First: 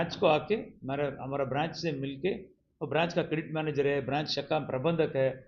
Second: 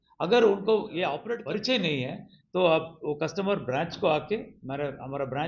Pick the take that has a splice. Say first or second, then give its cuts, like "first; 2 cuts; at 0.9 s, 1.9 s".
second; 1 cut; at 1.2 s